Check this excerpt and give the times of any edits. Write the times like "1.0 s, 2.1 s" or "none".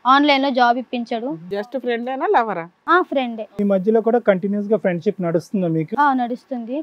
1.6 s